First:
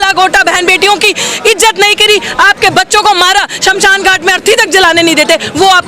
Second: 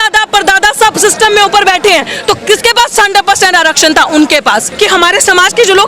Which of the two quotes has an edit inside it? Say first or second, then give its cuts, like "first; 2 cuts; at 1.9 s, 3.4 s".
second; 1 cut; at 4.7 s